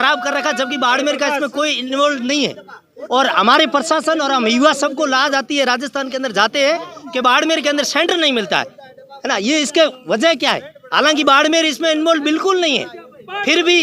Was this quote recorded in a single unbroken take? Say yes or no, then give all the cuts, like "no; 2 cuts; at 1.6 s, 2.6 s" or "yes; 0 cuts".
yes; 0 cuts